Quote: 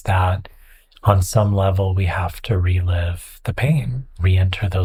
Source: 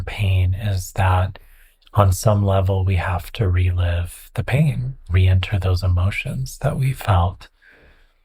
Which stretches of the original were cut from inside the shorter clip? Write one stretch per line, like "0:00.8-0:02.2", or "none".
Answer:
none

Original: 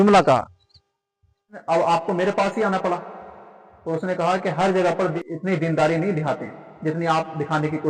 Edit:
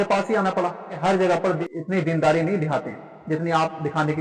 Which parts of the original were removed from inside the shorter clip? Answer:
0:03.2-0:04.5

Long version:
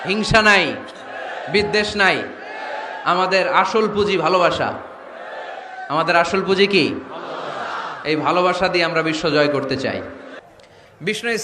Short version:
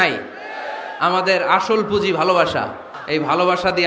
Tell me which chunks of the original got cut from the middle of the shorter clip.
0:04.9-0:07.9

